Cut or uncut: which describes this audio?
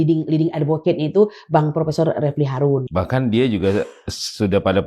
cut